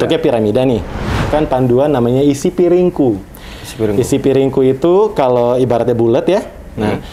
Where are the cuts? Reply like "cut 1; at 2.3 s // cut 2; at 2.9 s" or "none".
cut 1; at 1.2 s

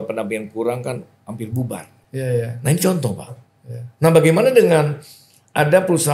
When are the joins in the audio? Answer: cut 1; at 1.9 s

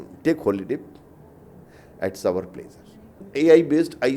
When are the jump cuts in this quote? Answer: cut 1; at 3.2 s

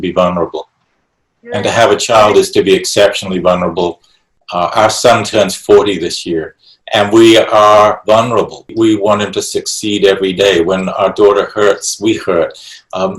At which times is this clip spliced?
none

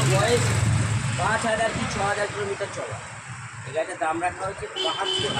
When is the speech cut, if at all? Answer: none

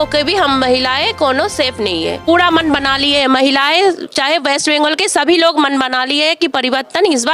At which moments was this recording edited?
cut 1; at 2.2 s

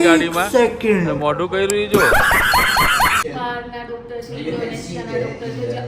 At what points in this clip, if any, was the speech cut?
cut 1; at 3.2 s

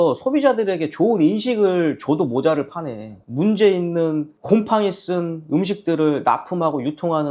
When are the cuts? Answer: cut 1; at 3.2 s

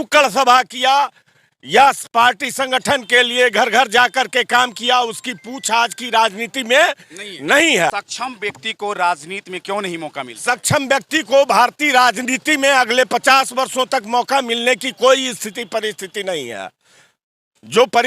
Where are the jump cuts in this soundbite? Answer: cut 1; at 7.9 s

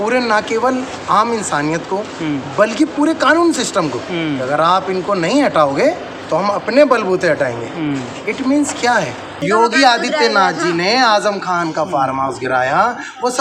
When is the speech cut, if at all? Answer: cut 1; at 9.4 s

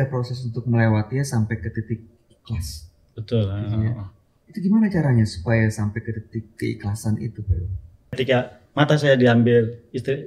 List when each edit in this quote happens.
cut 1; at 8.2 s

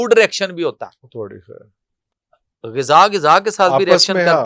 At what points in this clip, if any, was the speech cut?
none

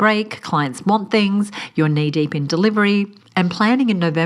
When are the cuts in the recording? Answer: cut 1; at 3.2 s

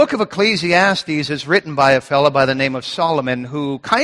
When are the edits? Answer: none

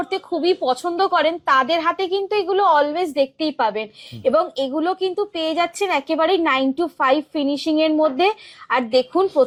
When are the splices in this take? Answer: none

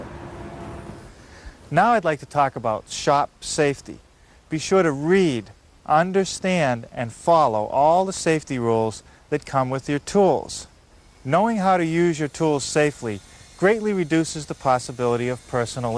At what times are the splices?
none

